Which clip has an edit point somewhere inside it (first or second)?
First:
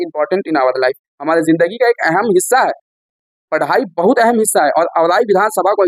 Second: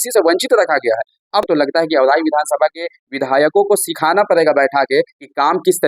second